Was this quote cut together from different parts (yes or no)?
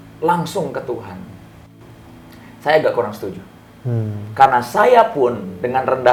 no